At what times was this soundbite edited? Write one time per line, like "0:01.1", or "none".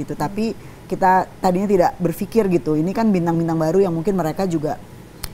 none